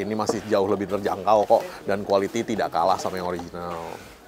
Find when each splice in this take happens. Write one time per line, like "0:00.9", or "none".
none